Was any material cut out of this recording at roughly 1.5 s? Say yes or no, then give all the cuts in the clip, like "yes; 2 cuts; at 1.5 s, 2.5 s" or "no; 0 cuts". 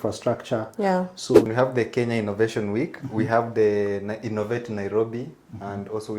yes; 1 cut; at 1.5 s